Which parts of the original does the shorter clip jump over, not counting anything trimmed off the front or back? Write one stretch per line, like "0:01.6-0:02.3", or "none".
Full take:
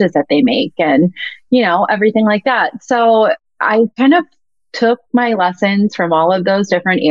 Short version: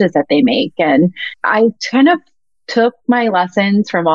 0:01.4-0:03.4